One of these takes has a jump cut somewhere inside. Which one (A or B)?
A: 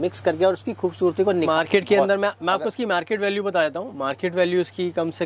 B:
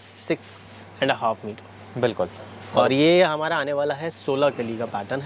A